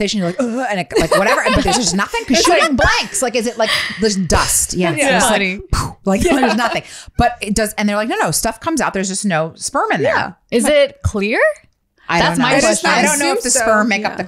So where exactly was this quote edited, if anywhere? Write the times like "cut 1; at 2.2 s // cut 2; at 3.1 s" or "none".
none